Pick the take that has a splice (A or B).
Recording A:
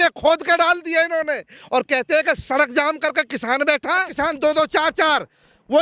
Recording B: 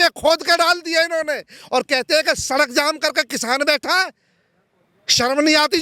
A